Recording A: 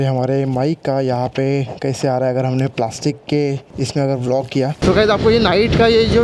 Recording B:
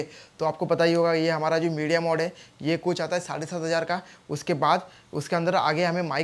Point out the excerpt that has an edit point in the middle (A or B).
A